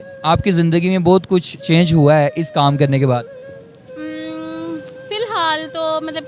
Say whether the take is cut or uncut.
uncut